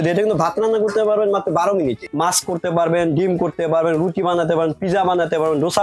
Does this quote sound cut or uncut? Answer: cut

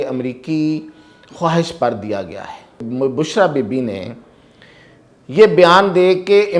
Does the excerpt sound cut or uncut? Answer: cut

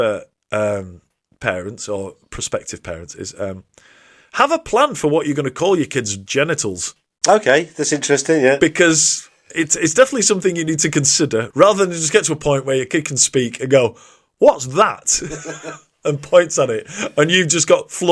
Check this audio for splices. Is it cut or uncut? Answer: cut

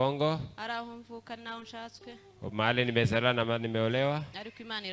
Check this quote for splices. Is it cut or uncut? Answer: uncut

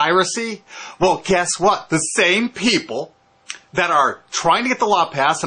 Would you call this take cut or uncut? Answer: uncut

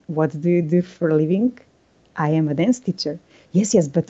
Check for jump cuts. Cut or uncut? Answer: uncut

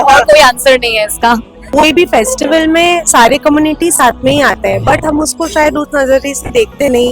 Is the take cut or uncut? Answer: cut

